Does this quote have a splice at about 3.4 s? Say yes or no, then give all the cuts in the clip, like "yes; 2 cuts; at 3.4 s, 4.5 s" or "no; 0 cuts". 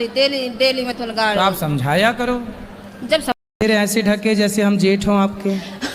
yes; 1 cut; at 3.4 s